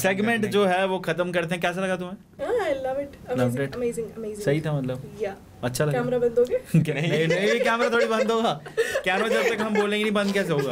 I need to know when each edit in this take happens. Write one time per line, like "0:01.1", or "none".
none